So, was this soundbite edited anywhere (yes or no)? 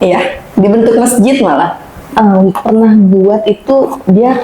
yes